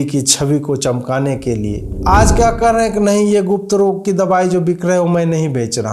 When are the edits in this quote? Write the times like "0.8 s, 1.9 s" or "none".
1.9 s

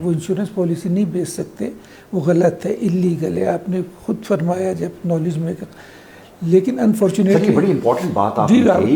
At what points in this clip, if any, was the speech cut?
none

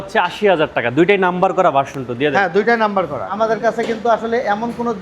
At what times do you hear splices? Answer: 3.3 s

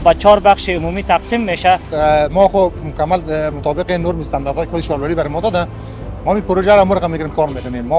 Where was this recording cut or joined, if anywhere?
1.9 s

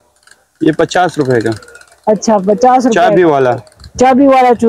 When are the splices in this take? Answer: none

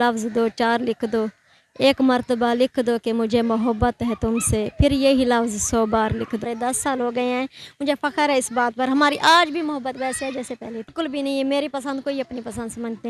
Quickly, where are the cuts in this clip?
6.5 s, 10.9 s

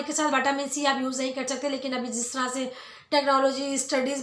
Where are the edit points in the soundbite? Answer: none

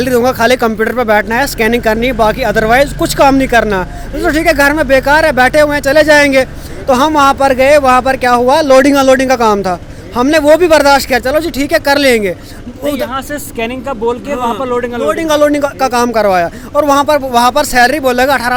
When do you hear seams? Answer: none

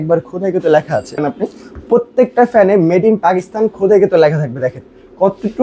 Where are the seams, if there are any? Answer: 1.2 s

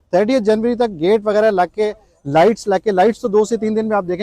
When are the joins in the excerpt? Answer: none

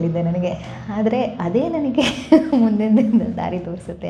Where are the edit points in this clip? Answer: none

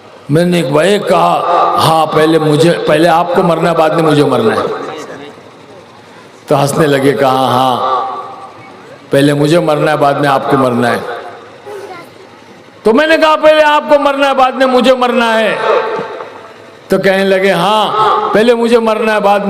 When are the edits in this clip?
11.7 s

